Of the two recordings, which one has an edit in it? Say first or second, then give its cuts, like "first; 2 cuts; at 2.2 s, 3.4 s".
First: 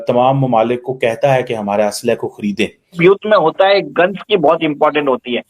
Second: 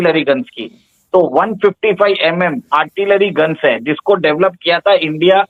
first; 1 cut; at 3.0 s